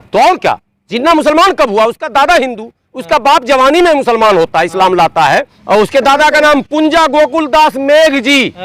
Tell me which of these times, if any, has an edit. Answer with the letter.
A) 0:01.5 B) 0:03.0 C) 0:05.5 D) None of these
C